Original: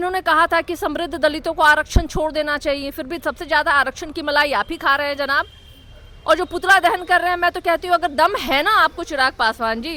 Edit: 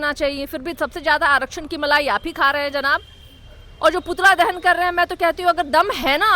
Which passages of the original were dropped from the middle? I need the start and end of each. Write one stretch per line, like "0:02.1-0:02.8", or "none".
none